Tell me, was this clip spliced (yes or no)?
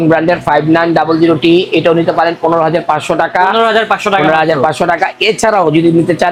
no